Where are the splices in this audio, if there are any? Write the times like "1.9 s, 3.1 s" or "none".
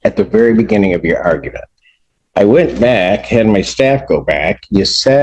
none